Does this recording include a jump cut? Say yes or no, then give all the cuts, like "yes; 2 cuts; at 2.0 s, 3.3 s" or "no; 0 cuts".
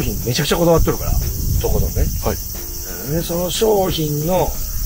no; 0 cuts